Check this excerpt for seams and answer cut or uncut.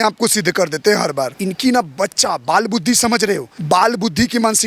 cut